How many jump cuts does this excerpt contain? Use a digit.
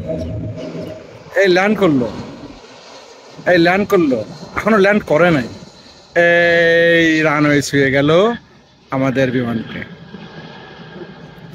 1